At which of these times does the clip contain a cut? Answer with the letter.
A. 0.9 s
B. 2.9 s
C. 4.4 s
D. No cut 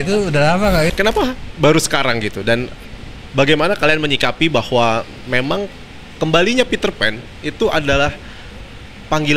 A